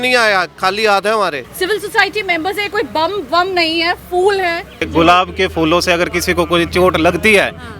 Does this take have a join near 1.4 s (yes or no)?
yes